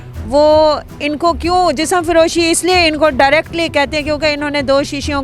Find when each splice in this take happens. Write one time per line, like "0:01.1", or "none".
none